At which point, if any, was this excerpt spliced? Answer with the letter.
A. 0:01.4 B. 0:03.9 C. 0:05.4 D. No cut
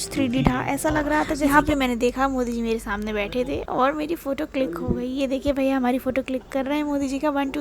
A